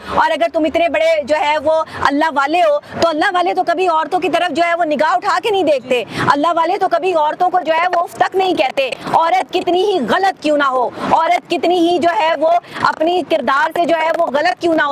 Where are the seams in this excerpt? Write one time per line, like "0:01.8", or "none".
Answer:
none